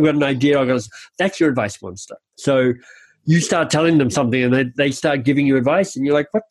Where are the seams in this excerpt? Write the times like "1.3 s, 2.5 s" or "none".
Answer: 3.1 s